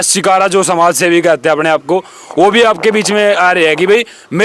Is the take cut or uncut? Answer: uncut